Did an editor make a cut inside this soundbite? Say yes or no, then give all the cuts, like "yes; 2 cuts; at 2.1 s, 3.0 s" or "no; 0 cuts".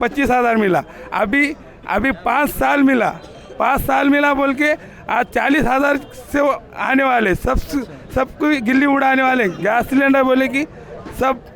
no; 0 cuts